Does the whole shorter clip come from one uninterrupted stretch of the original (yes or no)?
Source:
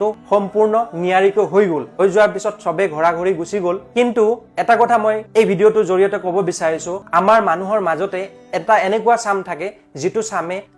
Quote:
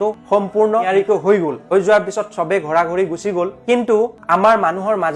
no